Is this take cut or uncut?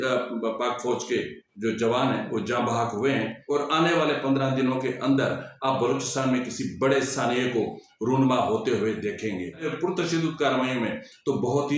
cut